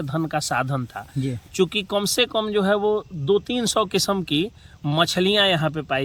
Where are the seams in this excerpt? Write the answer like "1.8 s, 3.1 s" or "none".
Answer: none